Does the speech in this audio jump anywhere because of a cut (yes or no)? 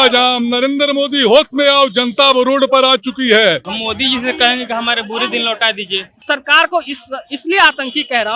yes